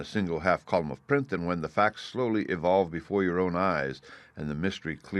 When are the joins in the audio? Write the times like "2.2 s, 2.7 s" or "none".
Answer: 1.3 s